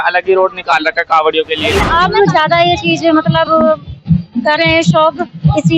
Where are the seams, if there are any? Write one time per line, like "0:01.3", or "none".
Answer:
0:01.7